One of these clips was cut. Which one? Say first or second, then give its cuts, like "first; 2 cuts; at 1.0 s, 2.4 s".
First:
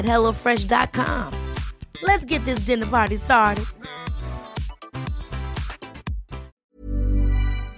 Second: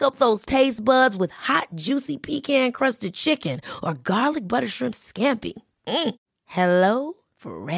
first; 1 cut; at 6.5 s